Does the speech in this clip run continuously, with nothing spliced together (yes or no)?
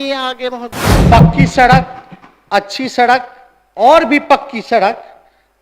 no